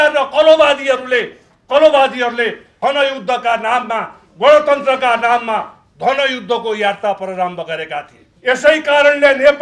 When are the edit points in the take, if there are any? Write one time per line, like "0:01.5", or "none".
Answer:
none